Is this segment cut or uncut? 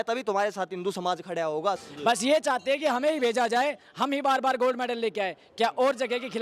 cut